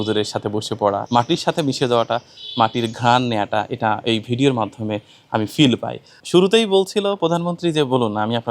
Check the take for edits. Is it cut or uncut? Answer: cut